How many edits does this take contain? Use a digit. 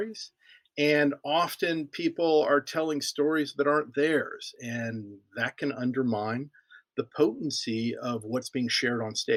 0